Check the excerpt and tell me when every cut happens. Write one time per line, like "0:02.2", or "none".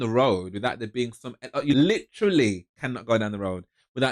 0:01.7